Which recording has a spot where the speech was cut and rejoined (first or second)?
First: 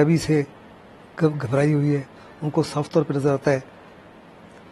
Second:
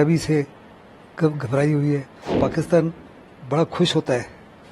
second